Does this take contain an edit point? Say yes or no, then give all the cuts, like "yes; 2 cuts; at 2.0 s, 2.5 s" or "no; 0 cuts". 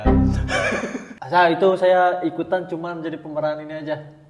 yes; 1 cut; at 1.0 s